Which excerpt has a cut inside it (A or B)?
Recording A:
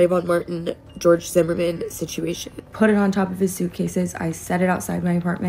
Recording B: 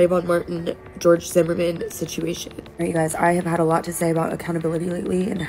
A